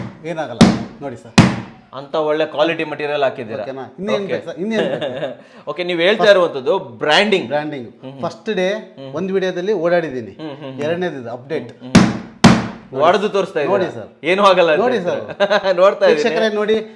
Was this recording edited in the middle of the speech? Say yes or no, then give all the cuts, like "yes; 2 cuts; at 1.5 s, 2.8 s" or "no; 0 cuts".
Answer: no; 0 cuts